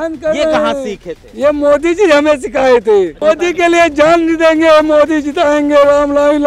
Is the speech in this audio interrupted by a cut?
yes; 1 cut; at 3.2 s

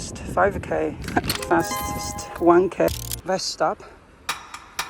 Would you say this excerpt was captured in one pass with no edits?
no; 1 cut; at 3.0 s

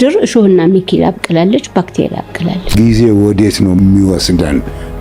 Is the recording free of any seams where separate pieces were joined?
no; 1 cut; at 2.7 s

